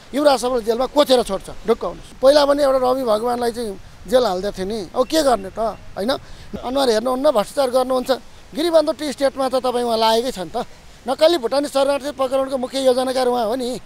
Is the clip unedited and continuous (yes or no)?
no